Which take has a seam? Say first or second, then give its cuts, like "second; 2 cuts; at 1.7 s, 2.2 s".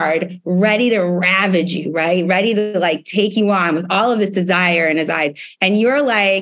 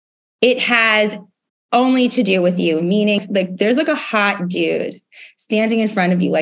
second; 1 cut; at 3.2 s